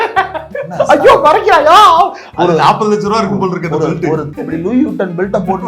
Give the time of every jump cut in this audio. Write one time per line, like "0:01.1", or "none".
0:04.3